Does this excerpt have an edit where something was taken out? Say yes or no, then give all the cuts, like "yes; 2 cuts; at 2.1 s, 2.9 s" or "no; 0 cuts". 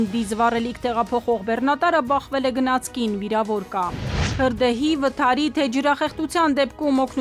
no; 0 cuts